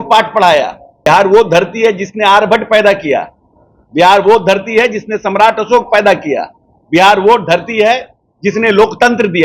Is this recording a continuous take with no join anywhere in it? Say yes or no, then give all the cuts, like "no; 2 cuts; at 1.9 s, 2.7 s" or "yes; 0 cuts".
no; 1 cut; at 1.1 s